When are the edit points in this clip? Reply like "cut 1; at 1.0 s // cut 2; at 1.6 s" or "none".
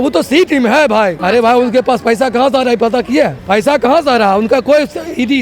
cut 1; at 1.2 s // cut 2; at 3.4 s